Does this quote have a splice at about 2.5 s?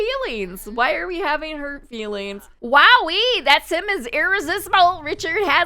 yes; 1 cut; at 2.5 s

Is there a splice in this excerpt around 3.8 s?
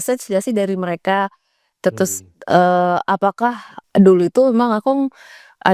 yes; 1 cut; at 3.8 s

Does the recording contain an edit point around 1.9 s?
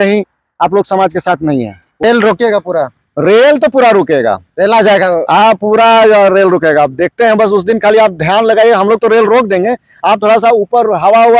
yes; 1 cut; at 1.9 s

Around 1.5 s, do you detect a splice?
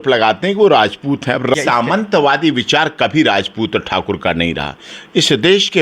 yes; 1 cut; at 1.5 s

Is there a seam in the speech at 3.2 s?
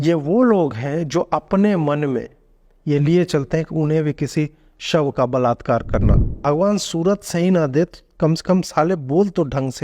no; 1 cut; at 6.4 s

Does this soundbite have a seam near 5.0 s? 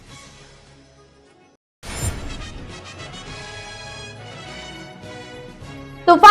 no; 1 cut; at 1.4 s

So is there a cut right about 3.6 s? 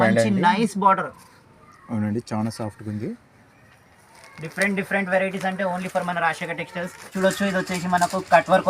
no; 1 cut; at 7.0 s

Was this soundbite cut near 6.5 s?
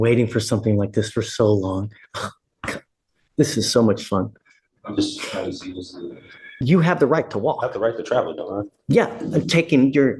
yes; 1 cut; at 6.5 s

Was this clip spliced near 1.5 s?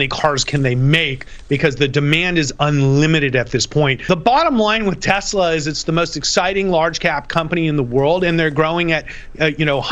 no; 1 cut; at 4.1 s

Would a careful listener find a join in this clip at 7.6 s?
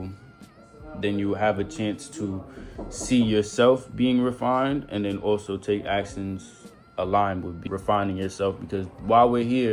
yes; 1 cut; at 7.6 s

